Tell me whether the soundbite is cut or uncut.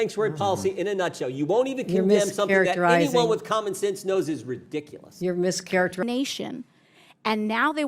cut